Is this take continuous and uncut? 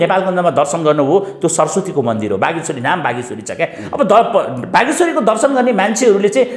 yes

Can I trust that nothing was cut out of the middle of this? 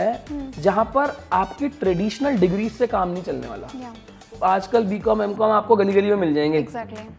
no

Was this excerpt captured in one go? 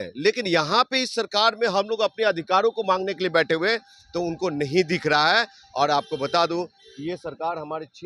yes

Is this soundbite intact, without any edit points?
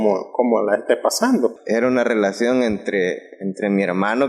no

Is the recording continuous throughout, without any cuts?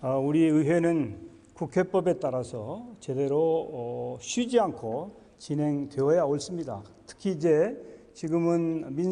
no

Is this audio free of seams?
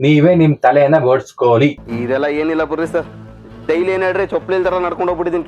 no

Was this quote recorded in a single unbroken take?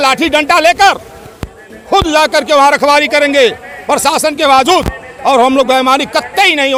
yes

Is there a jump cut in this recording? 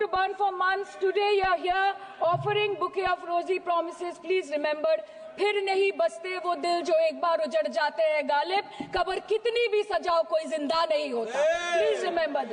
no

